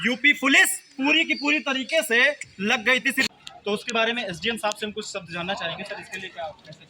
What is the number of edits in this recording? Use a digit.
1